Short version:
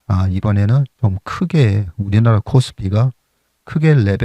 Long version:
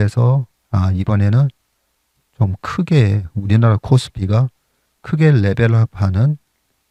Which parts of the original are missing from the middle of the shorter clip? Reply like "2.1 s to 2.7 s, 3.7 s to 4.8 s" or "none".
1.6 s to 2.3 s